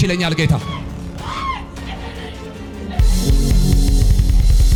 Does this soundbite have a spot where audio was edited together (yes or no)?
no